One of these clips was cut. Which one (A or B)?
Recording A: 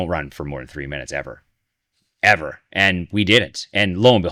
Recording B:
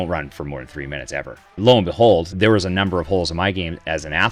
B